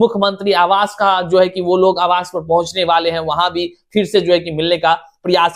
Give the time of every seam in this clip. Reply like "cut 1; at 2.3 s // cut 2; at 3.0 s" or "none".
none